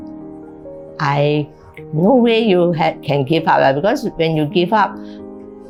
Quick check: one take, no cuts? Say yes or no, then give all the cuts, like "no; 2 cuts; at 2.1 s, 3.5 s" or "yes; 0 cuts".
yes; 0 cuts